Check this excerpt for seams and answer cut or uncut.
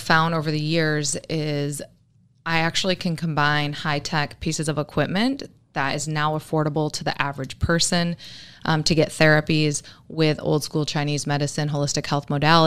uncut